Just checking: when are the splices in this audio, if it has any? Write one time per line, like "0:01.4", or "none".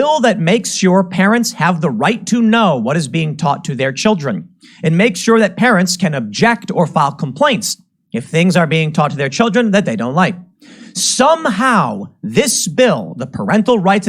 0:09.7